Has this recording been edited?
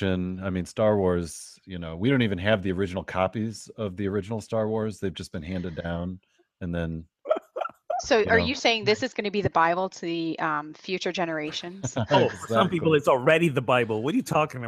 no; 0 cuts

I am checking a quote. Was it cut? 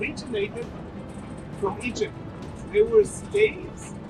no; 0 cuts

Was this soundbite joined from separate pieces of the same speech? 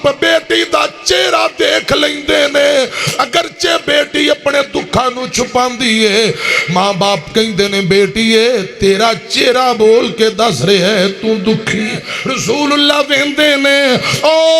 yes; 1 cut; at 12.2 s

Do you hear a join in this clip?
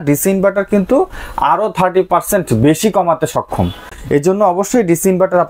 no; 0 cuts

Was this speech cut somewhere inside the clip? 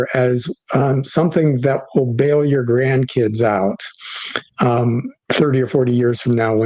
yes; 1 cut; at 5.1 s

